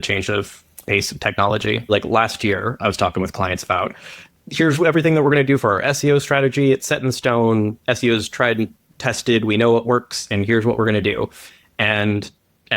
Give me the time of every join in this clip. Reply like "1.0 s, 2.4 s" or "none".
1.9 s